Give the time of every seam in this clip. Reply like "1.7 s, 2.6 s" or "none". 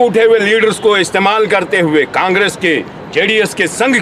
none